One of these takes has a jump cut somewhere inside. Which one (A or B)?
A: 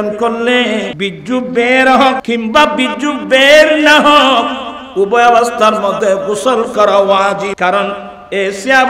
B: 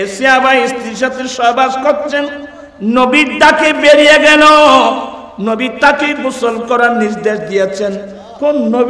A